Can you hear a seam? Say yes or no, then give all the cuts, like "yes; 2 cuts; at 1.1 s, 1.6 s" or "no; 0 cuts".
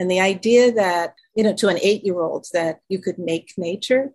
yes; 1 cut; at 1.2 s